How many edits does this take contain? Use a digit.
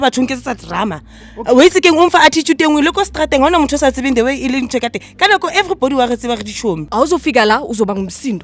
1